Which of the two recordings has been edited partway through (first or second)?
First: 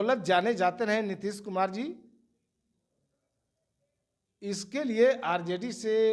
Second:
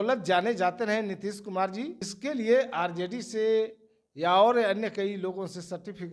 second